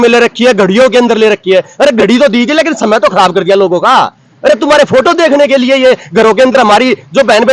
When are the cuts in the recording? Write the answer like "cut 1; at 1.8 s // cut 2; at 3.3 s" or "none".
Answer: none